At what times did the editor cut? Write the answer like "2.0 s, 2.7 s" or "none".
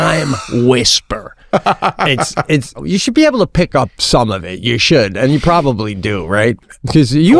2.8 s, 6.6 s